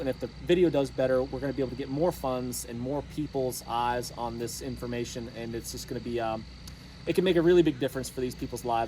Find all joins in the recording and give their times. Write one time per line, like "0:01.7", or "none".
none

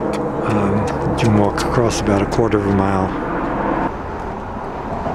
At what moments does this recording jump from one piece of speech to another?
0:02.8

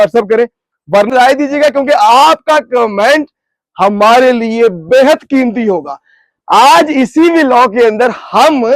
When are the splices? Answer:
0:01.1

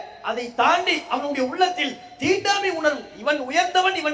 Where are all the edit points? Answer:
none

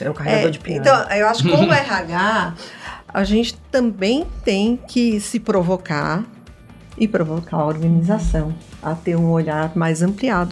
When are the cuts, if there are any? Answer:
none

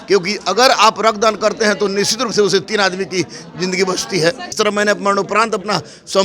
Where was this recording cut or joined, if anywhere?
0:04.5

